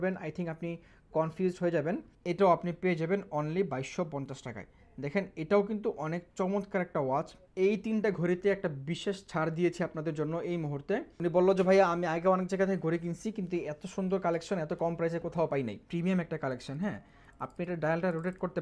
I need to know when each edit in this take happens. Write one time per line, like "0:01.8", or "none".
0:02.1
0:07.4
0:11.1
0:15.8